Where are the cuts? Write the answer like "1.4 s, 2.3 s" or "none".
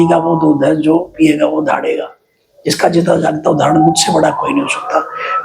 none